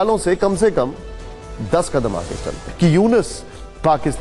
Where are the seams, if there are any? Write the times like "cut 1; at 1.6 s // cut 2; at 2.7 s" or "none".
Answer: cut 1; at 2.7 s